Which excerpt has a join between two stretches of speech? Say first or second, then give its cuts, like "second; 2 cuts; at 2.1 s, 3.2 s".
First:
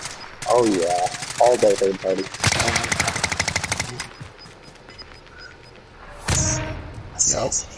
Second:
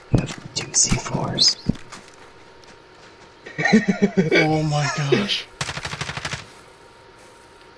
first; 1 cut; at 2.3 s